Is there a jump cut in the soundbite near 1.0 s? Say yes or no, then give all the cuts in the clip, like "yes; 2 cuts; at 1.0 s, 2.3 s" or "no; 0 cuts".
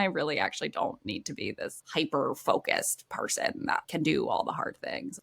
no; 1 cut; at 3.8 s